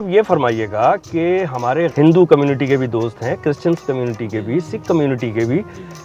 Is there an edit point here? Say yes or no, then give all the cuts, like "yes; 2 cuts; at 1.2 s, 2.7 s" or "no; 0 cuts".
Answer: yes; 1 cut; at 1.9 s